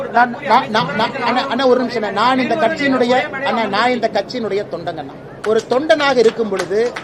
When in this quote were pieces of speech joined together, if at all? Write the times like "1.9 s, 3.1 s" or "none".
5.2 s